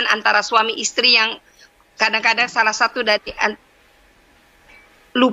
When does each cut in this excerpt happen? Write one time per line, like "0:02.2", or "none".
none